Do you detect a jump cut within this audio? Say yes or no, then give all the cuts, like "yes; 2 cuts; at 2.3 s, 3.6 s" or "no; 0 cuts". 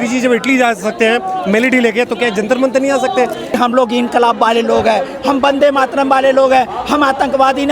yes; 1 cut; at 3.6 s